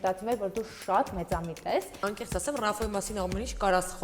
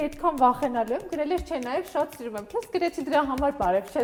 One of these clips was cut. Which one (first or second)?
first